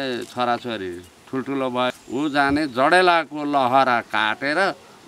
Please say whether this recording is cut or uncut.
cut